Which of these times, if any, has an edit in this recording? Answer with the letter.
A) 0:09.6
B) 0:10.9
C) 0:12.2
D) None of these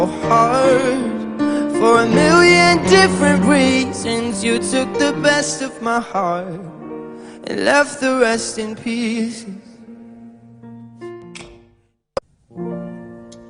C